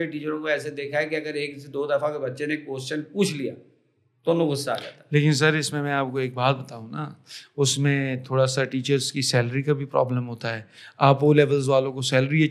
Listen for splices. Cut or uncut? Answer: uncut